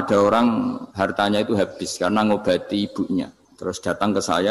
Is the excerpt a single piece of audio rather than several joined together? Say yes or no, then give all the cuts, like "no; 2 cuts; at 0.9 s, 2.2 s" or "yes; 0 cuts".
no; 2 cuts; at 0.8 s, 3.4 s